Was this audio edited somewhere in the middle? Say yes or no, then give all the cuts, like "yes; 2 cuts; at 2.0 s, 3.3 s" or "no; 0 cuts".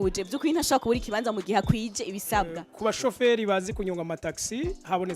yes; 1 cut; at 2.6 s